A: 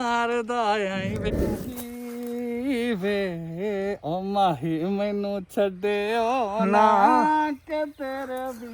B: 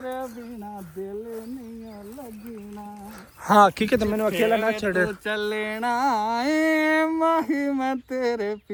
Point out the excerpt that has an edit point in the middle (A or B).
A